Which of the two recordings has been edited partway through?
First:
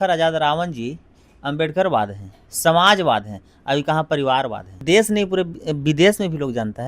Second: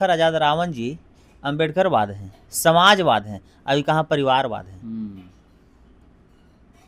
first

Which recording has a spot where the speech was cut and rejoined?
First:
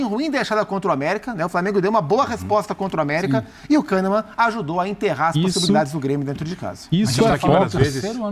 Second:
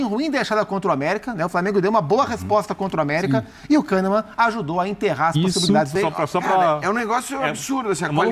second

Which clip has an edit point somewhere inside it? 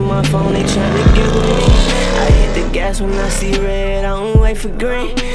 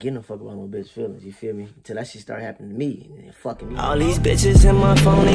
second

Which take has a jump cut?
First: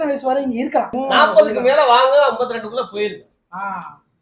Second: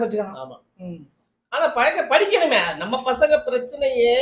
first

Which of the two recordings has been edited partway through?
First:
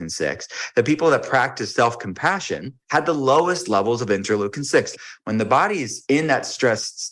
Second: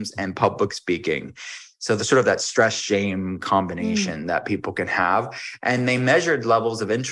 first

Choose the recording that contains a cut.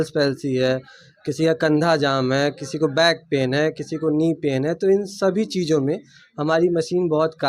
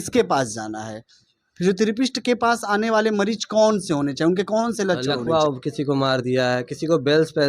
second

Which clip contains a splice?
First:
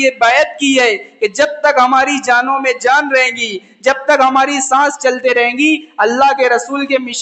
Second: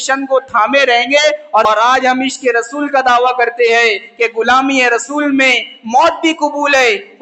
second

